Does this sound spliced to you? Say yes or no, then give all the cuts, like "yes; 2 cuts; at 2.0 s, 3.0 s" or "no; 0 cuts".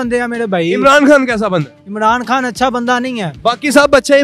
no; 0 cuts